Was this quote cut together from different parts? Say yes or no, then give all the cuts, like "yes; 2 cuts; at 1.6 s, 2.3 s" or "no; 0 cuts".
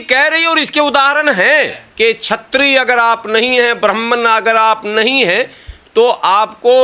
yes; 1 cut; at 1.8 s